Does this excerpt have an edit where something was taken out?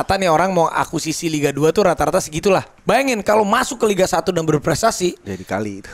yes; 1 cut; at 2.7 s

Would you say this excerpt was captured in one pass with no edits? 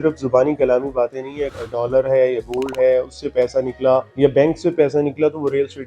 no; 2 cuts; at 1.5 s, 4.1 s

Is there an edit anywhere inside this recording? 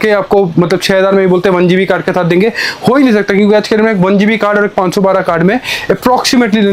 no; 0 cuts

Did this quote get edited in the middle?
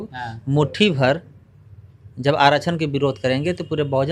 no; 0 cuts

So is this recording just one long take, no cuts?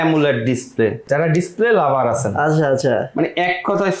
no; 1 cut; at 1.1 s

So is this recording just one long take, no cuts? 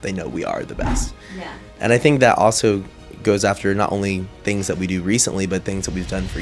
yes; 0 cuts

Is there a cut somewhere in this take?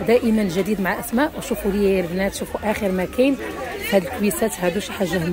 no; 0 cuts

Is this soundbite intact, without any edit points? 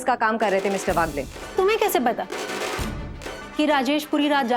yes; 0 cuts

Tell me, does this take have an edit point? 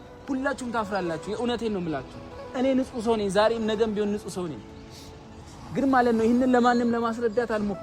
no; 0 cuts

